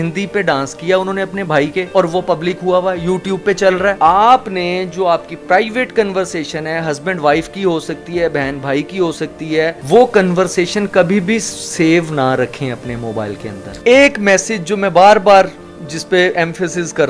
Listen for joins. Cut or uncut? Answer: cut